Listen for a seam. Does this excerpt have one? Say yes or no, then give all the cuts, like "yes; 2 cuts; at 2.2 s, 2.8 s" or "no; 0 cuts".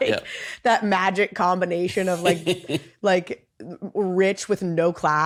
no; 0 cuts